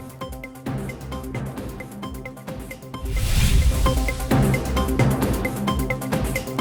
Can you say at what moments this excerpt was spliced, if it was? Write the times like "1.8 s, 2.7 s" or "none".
none